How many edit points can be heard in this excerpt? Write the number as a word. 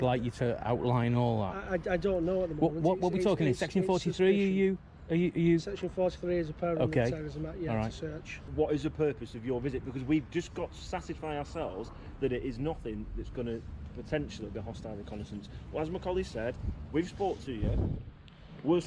one